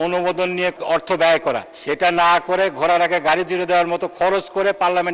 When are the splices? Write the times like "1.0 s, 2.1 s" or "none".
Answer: 0.8 s, 1.7 s